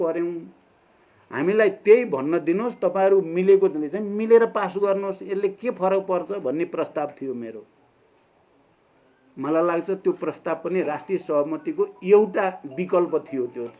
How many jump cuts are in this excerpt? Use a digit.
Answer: 0